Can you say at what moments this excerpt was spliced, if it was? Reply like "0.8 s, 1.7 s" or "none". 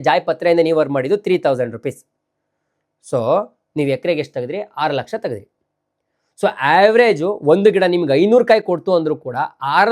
none